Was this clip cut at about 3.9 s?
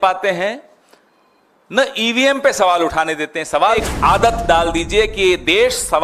yes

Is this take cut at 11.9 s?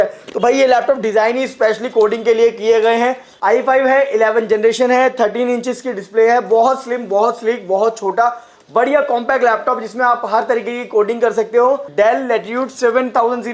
yes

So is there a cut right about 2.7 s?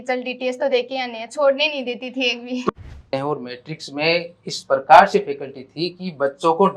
yes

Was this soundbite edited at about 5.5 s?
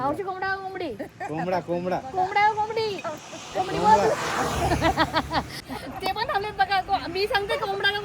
yes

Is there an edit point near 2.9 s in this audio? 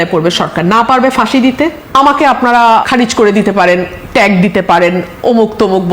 yes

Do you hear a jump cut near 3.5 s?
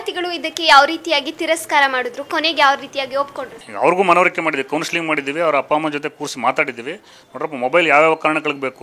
yes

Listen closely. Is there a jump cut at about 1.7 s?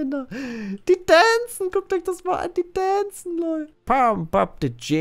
no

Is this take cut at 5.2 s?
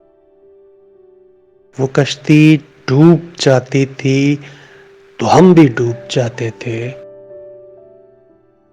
no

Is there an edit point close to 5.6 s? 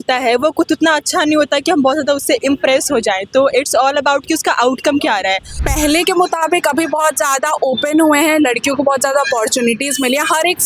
yes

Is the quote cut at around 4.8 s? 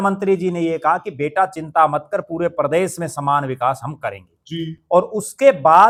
no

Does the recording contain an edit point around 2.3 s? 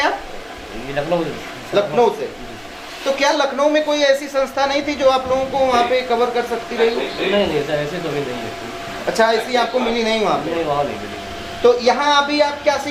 no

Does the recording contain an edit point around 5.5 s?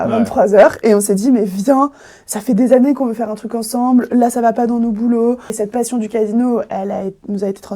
yes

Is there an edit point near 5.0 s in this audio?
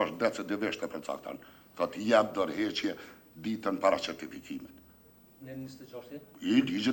no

